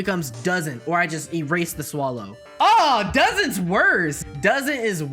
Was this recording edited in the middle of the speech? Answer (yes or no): yes